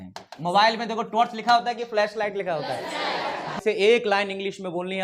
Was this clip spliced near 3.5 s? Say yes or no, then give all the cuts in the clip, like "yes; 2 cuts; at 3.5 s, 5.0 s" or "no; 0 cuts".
yes; 1 cut; at 3.5 s